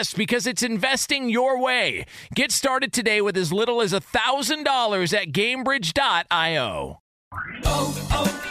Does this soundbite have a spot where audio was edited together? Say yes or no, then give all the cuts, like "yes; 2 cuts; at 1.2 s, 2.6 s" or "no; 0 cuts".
yes; 1 cut; at 7.0 s